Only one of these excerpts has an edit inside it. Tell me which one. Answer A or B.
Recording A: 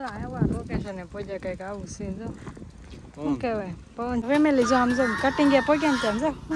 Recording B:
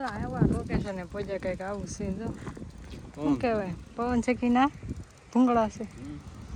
A